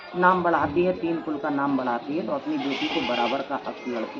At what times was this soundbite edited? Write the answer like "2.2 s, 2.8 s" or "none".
none